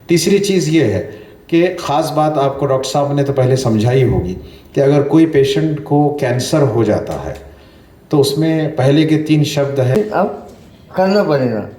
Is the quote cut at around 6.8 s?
no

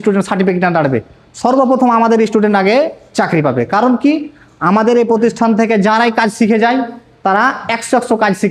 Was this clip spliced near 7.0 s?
no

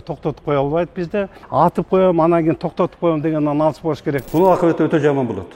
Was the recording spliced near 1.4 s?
yes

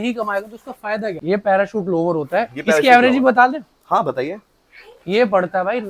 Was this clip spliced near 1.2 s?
yes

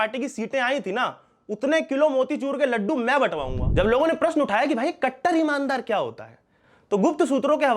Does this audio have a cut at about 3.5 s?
yes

